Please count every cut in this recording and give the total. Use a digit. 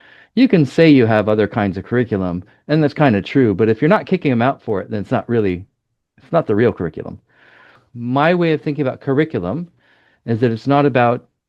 1